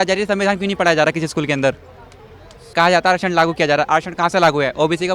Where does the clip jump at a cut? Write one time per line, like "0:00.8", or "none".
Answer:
0:02.7